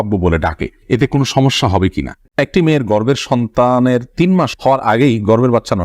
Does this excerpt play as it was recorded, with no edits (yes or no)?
no